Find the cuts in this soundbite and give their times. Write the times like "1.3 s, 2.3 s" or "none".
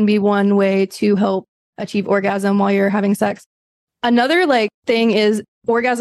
none